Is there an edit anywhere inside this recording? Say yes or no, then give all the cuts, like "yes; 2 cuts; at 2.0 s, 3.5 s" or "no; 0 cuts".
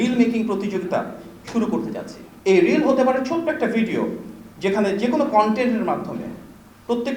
yes; 1 cut; at 2.2 s